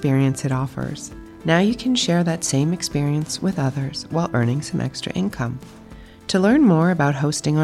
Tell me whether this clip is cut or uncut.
uncut